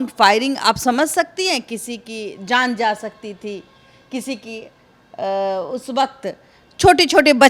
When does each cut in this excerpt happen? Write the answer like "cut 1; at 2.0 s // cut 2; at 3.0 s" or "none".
none